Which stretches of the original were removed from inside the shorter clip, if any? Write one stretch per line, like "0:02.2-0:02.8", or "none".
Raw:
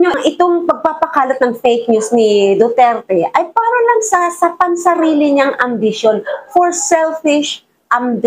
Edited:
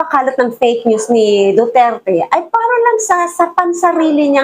none